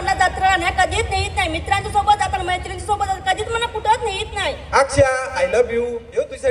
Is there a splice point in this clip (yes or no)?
no